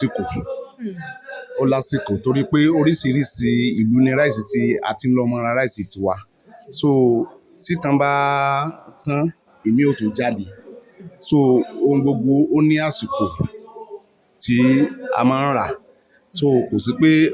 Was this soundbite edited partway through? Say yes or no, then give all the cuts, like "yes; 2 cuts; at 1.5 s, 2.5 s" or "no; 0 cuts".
no; 0 cuts